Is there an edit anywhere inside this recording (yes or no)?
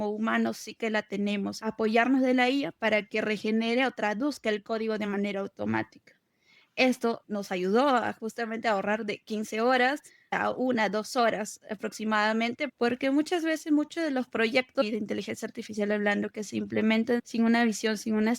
yes